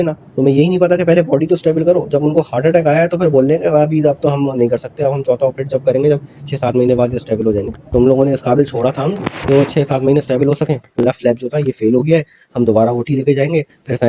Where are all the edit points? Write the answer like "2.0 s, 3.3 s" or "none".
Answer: 10.9 s